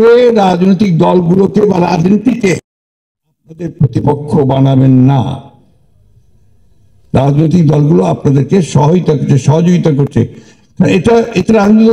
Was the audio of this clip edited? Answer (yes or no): no